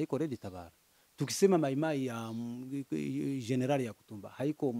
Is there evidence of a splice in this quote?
no; 0 cuts

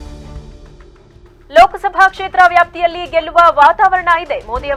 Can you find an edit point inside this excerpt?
no; 0 cuts

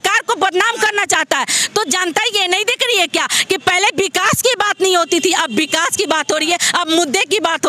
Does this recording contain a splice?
no; 0 cuts

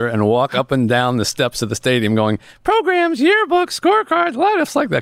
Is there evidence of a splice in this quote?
no; 0 cuts

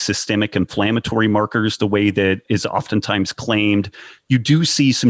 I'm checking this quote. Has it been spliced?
yes; 1 cut; at 2.4 s

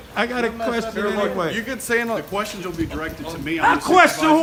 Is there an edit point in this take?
no; 0 cuts

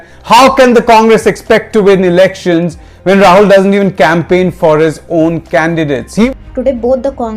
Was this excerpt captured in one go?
no; 1 cut; at 6.3 s

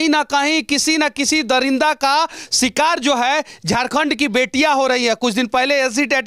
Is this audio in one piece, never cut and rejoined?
yes; 0 cuts

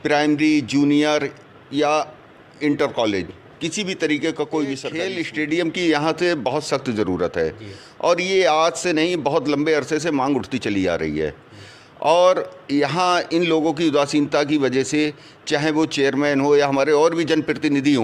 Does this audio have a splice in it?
yes; 1 cut; at 5.0 s

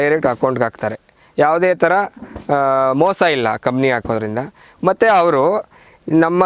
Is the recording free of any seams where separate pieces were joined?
yes; 0 cuts

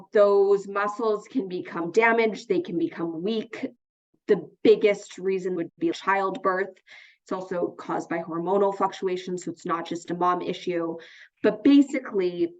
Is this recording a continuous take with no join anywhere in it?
no; 1 cut; at 5.7 s

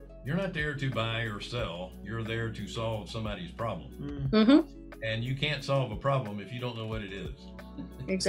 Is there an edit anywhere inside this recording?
yes; 1 cut; at 2.0 s

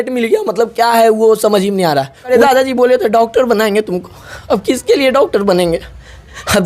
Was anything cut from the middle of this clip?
yes; 1 cut; at 2.3 s

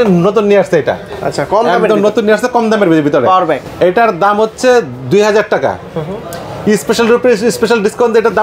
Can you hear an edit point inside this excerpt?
no; 0 cuts

